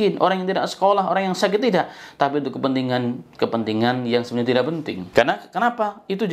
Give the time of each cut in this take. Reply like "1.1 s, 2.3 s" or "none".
5.0 s

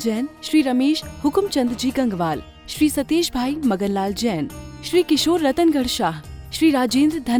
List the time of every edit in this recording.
none

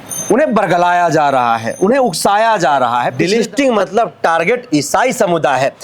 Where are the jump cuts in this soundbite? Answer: 3.2 s

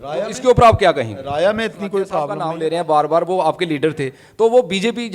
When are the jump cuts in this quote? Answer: 2.3 s

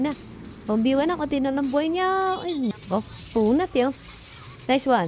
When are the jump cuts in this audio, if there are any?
2.7 s

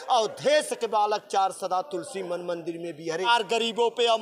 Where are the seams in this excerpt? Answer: 3.3 s

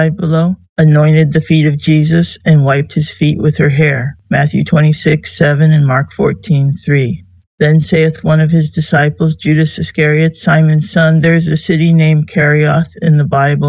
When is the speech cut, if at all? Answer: none

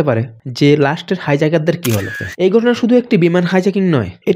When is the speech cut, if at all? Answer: 2.1 s

